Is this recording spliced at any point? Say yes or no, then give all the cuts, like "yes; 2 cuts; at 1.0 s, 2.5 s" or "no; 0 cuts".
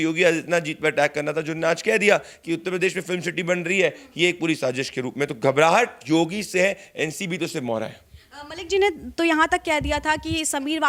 no; 0 cuts